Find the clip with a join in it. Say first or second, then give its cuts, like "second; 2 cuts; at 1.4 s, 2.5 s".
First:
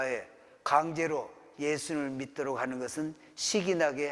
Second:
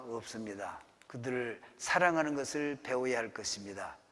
second; 1 cut; at 1.3 s